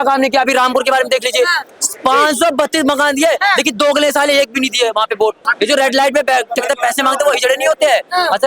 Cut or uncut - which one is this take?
cut